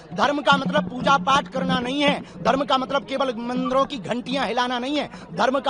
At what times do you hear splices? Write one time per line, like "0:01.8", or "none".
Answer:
none

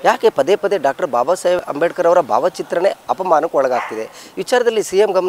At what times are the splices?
0:01.6

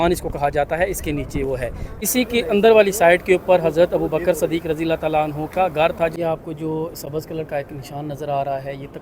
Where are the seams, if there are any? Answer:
0:01.9
0:06.1

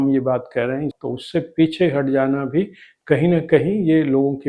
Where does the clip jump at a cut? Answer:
0:00.9

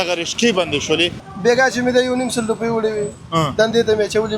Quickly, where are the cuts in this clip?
0:01.2

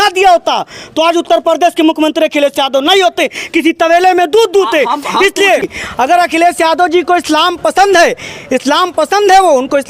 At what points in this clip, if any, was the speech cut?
0:05.6

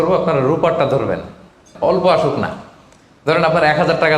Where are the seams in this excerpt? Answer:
0:01.7

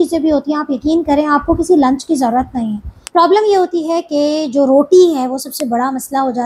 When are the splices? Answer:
0:02.9

